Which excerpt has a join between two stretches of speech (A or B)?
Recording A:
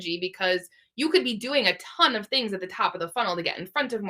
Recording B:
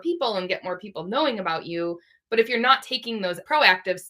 B